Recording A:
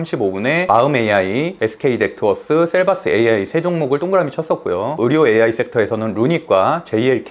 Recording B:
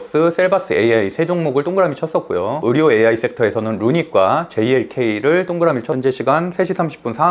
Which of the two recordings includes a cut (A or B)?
B